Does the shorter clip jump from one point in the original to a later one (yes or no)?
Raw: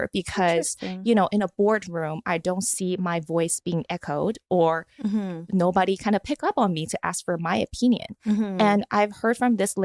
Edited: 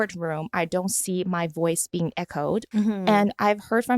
yes